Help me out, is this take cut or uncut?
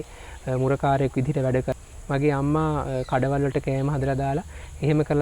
cut